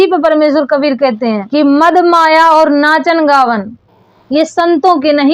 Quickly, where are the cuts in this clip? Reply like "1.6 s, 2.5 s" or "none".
1.4 s